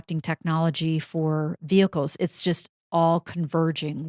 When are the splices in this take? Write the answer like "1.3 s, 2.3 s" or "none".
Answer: none